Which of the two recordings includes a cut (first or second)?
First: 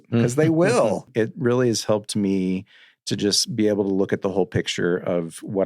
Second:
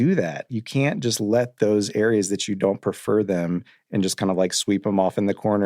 first